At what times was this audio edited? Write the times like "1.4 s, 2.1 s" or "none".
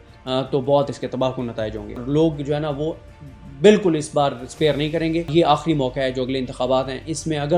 2.0 s, 5.3 s